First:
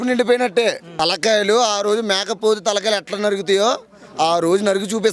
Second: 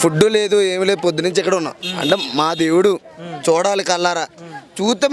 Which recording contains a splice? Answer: first; 1 cut; at 1.0 s

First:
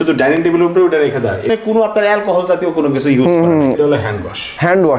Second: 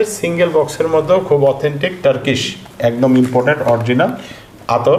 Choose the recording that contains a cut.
first; 2 cuts; at 1.7 s, 3.7 s

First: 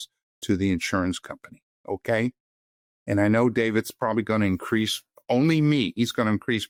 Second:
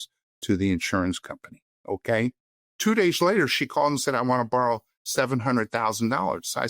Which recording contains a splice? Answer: second; 1 cut; at 2.7 s

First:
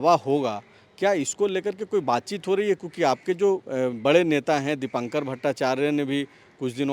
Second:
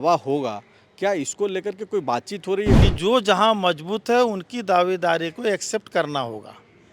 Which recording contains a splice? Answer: second; 1 cut; at 2.9 s

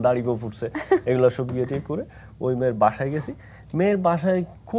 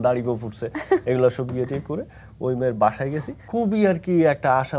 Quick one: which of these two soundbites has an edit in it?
second; 1 cut; at 3.4 s

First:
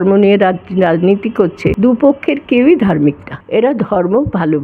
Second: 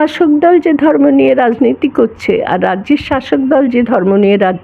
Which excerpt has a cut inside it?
first; 2 cuts; at 1.8 s, 3.3 s

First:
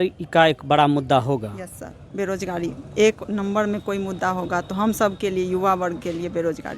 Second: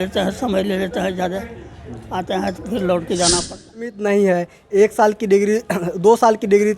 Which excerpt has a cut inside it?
second; 1 cut; at 3.9 s

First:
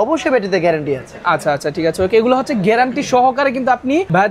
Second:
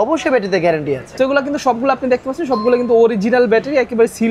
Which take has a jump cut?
second; 1 cut; at 1.2 s

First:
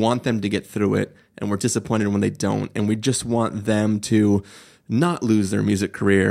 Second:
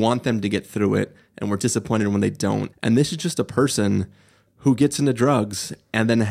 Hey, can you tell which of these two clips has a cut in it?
second; 1 cut; at 2.7 s

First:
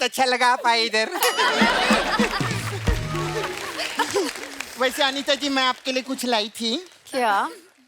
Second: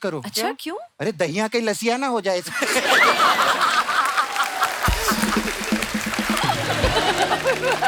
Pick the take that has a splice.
first; 1 cut; at 3.6 s

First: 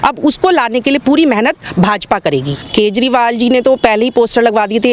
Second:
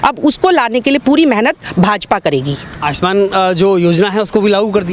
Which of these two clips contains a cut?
first; 1 cut; at 2.6 s

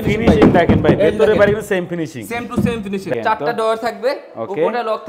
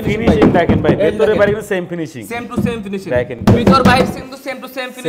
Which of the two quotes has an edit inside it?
first; 1 cut; at 3.1 s

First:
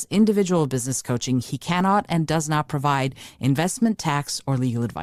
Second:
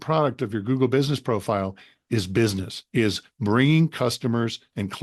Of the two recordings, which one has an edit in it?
second; 1 cut; at 2.7 s

